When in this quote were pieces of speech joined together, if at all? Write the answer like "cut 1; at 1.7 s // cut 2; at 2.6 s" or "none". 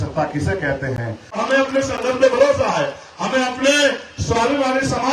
cut 1; at 1.4 s